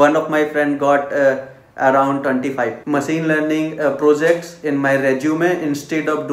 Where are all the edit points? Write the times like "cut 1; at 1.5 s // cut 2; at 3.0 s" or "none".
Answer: cut 1; at 2.8 s